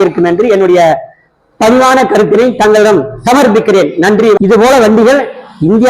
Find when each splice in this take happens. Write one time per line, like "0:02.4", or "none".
0:04.4